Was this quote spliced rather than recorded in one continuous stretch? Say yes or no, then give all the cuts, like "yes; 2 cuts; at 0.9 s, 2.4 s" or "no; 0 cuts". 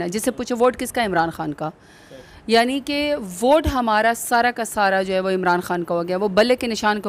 no; 0 cuts